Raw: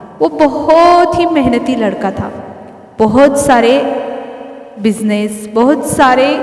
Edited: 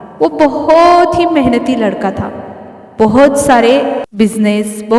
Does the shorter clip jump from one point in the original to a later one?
yes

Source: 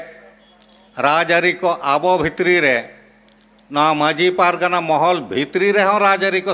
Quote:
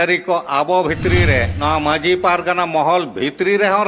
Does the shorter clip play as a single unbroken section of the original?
no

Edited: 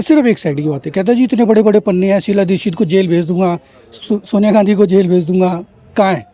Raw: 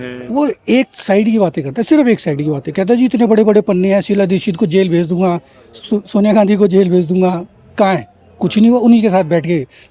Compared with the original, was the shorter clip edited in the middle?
no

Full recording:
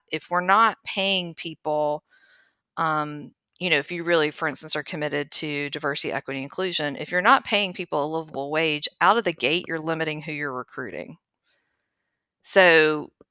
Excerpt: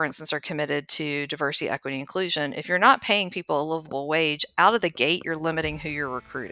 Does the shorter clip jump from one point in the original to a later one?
no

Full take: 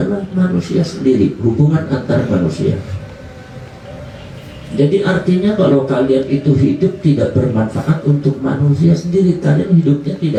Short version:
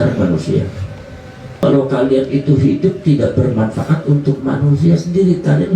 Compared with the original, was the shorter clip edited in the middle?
yes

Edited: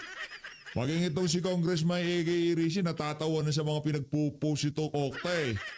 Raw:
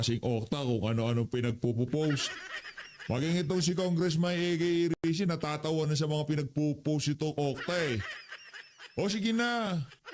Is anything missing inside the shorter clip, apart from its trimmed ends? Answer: yes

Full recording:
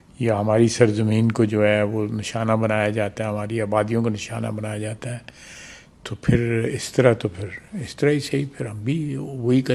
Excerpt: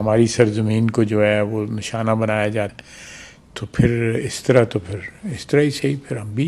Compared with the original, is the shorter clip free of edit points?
no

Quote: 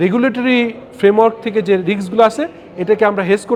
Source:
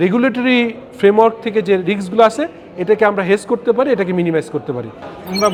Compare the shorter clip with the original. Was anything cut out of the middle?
no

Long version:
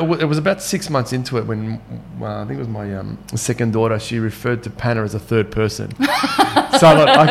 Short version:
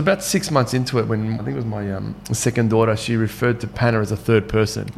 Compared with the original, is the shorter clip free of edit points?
no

